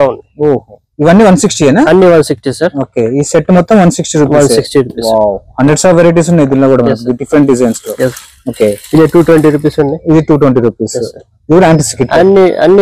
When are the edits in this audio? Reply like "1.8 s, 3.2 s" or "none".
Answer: none